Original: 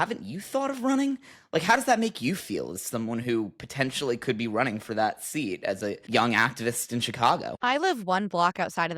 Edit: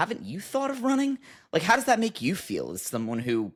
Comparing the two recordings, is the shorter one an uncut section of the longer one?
yes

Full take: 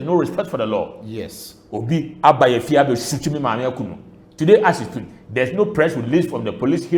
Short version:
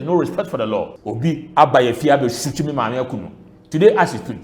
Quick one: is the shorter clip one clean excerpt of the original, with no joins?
no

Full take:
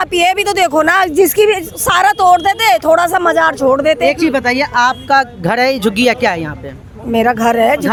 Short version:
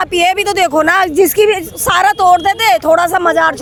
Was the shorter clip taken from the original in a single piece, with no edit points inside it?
yes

